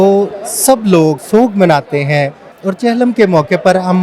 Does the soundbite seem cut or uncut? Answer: cut